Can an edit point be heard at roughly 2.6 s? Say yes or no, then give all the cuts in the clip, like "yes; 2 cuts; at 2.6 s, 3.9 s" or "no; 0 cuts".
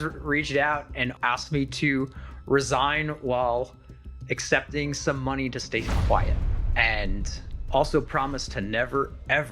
no; 1 cut; at 1.1 s